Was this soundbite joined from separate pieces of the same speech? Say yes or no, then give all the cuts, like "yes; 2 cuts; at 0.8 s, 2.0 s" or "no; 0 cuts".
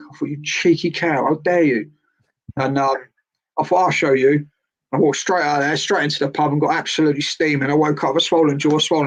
no; 0 cuts